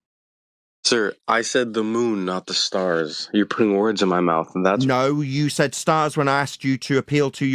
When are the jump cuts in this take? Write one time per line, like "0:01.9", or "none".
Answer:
none